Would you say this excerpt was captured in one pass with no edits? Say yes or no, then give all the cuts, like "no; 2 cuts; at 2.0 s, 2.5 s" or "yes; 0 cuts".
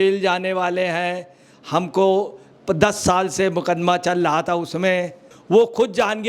no; 1 cut; at 5.3 s